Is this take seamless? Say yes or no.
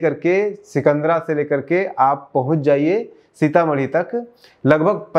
yes